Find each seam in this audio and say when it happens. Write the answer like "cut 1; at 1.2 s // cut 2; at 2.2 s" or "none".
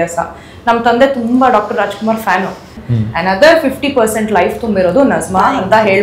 cut 1; at 2.8 s